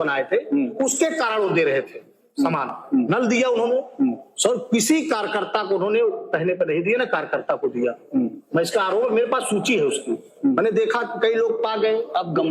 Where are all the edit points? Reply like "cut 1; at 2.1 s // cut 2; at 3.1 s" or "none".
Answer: none